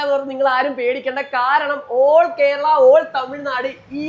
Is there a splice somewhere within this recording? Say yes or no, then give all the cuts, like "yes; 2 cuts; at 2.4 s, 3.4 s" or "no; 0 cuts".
no; 0 cuts